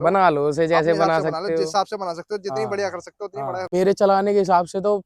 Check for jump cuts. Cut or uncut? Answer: cut